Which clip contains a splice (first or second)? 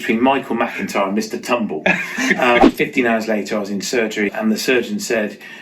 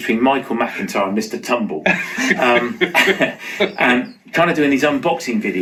first